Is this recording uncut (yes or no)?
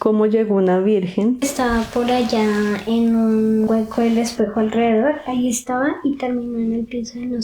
no